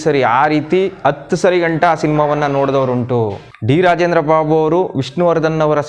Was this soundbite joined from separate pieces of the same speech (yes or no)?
yes